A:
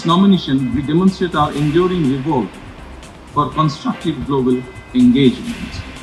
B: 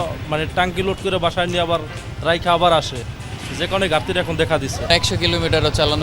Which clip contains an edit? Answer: B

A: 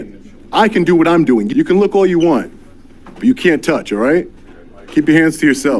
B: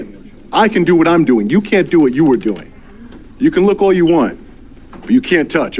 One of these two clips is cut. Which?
A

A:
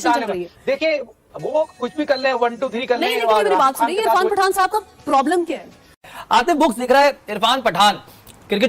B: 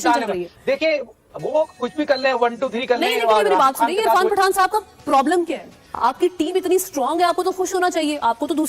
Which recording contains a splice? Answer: A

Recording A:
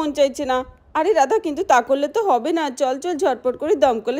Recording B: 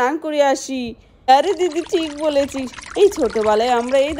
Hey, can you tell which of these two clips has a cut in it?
B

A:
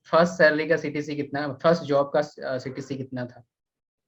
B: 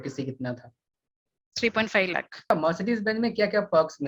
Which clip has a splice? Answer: B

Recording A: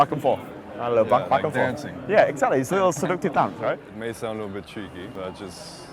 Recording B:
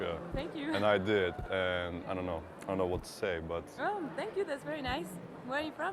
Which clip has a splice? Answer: A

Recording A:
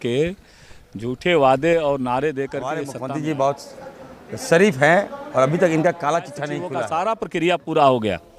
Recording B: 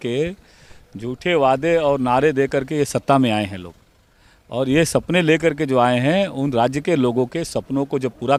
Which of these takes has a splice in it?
A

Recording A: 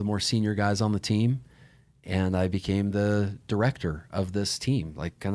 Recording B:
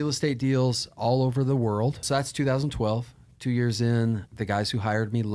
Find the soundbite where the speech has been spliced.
B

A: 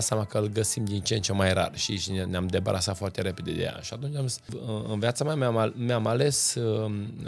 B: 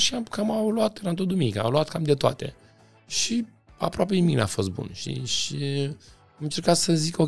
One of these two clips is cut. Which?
A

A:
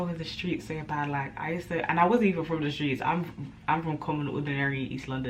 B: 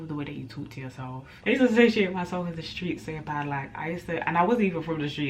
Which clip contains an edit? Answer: B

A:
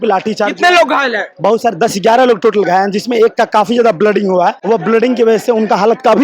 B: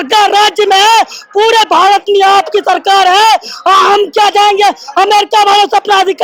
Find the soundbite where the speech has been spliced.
A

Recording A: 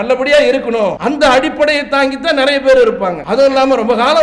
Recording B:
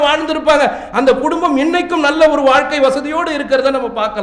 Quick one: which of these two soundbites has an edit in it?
A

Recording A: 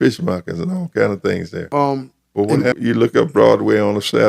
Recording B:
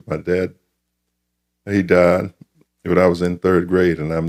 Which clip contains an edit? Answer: A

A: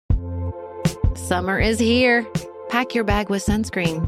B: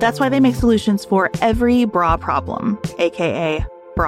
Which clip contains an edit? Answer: A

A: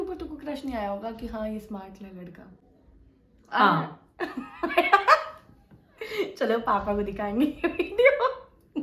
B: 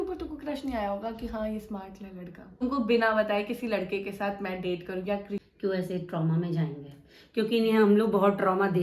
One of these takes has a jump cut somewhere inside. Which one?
B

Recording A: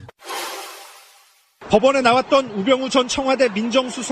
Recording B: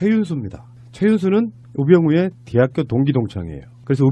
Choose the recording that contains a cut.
B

